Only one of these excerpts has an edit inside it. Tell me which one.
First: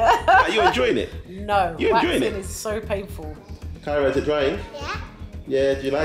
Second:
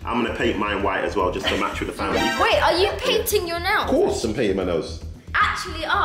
first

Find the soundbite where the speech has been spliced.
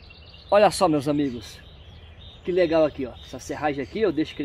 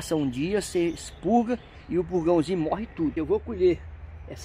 second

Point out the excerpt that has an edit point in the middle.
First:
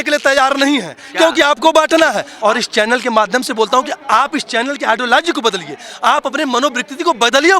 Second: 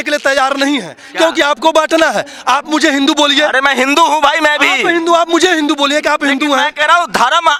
first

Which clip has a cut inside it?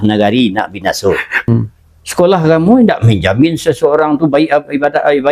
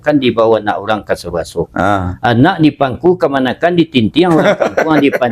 first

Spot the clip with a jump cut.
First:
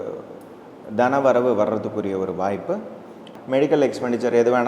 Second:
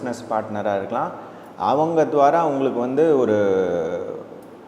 first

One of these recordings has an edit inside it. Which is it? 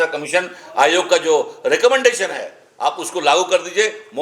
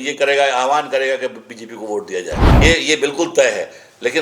second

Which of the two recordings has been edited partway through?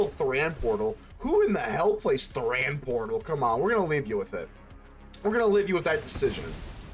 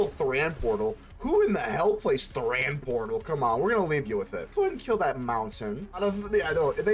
second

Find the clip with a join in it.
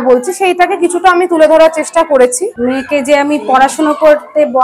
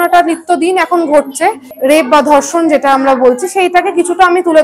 first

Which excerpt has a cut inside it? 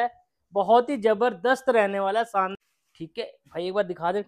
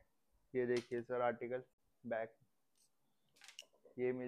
first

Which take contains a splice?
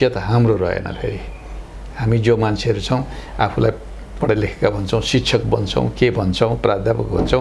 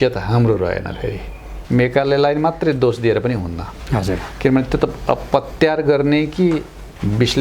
second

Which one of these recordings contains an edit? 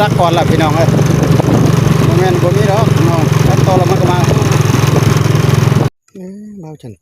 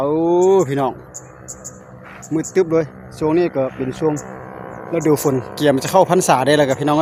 first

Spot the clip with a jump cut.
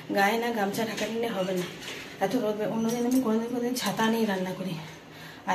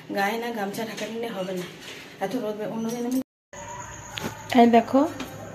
second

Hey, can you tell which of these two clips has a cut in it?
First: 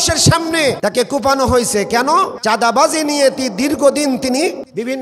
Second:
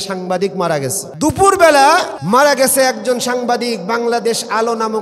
first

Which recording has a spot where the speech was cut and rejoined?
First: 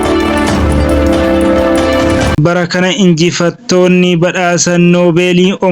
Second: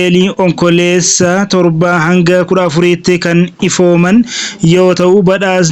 first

